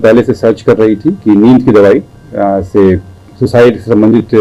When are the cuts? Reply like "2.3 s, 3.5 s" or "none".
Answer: none